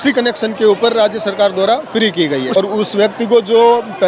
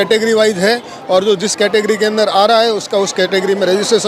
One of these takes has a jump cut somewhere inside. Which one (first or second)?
first